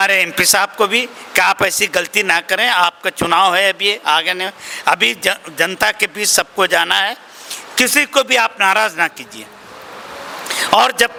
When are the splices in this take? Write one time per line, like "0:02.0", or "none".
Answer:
none